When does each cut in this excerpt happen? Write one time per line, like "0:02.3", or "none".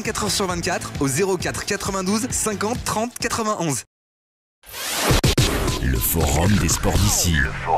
0:04.6